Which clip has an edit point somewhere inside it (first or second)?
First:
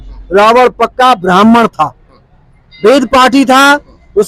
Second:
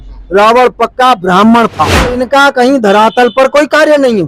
second